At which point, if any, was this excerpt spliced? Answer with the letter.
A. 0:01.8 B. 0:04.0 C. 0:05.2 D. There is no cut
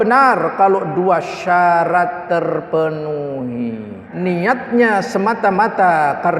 B